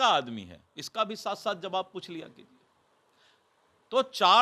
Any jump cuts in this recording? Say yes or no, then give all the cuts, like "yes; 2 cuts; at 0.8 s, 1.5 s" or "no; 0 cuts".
no; 0 cuts